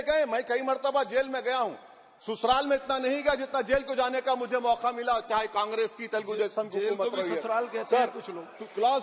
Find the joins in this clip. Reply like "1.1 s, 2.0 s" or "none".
none